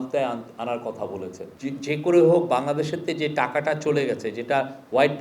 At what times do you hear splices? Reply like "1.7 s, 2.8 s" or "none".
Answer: 1.5 s